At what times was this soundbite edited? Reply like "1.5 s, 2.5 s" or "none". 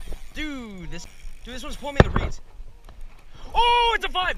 1.0 s